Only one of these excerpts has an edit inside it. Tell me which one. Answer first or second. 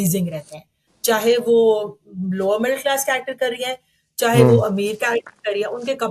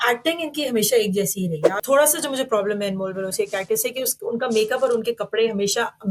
second